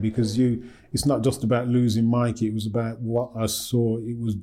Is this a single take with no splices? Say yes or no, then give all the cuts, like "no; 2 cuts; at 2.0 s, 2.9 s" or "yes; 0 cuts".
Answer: yes; 0 cuts